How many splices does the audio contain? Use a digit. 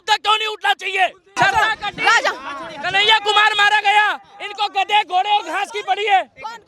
1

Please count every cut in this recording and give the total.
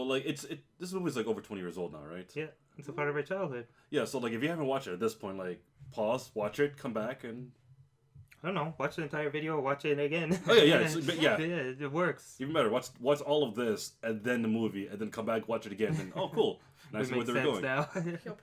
1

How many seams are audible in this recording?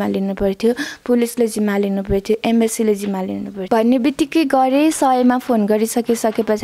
1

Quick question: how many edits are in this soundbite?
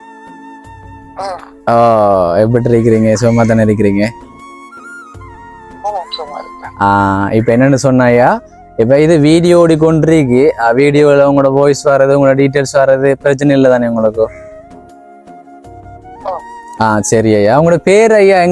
1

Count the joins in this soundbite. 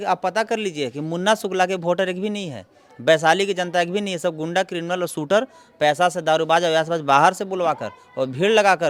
0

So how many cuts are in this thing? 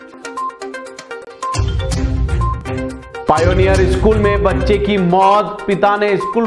0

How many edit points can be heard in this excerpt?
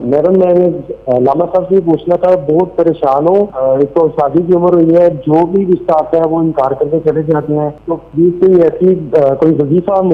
2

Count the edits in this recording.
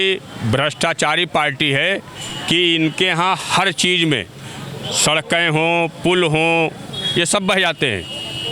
0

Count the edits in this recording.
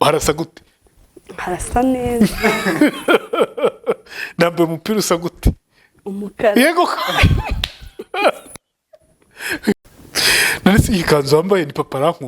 1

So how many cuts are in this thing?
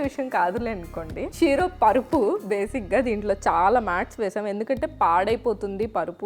1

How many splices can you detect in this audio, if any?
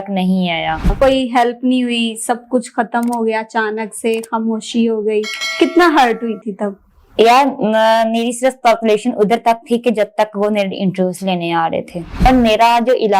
2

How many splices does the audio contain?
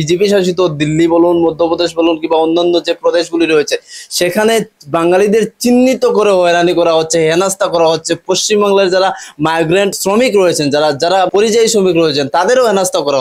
2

